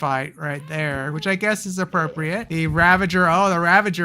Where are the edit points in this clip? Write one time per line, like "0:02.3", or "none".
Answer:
0:02.5